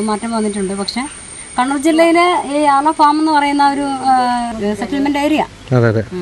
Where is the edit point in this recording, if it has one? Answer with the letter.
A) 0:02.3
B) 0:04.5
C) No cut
B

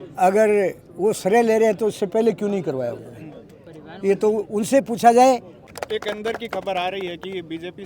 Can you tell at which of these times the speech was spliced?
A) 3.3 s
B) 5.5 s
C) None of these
B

